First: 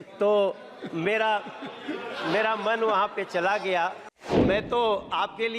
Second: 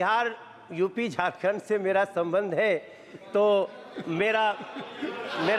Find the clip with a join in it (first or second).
first